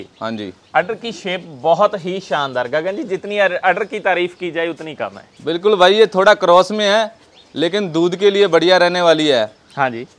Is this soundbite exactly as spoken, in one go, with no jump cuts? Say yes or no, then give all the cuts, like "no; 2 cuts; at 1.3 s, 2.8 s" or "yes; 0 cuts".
yes; 0 cuts